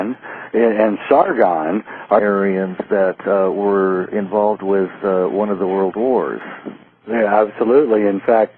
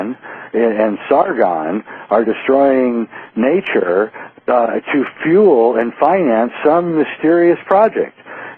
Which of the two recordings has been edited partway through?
second; 1 cut; at 2.2 s

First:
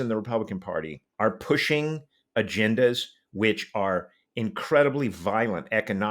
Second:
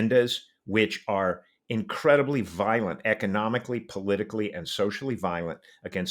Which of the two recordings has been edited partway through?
first; 1 cut; at 1.0 s

